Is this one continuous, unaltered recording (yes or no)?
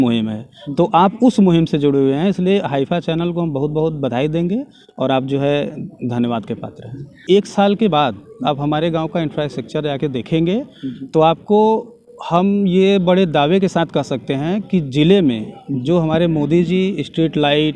no